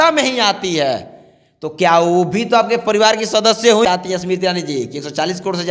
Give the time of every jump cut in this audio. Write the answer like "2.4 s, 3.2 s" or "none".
3.8 s